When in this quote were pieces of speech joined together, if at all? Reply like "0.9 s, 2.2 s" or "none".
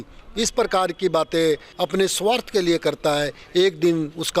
1.7 s